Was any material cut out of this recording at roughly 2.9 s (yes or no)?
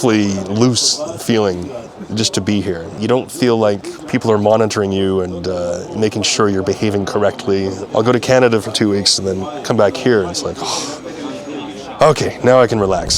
yes